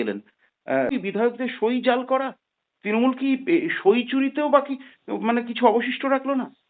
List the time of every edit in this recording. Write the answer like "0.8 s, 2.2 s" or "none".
0.9 s